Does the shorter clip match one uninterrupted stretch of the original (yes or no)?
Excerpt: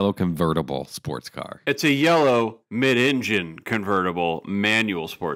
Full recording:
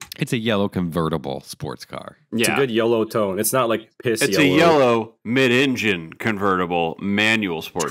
no